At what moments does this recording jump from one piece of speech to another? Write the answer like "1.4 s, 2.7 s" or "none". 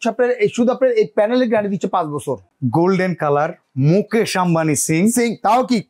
2.5 s